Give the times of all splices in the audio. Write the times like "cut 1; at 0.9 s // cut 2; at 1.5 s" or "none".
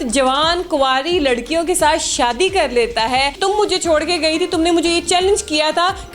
cut 1; at 3.4 s